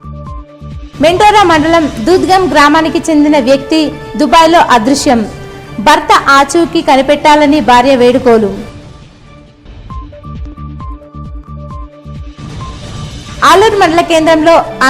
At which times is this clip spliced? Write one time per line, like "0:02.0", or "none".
0:00.9